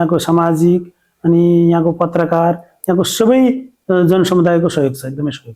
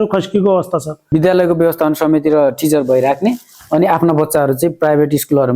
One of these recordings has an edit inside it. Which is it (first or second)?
second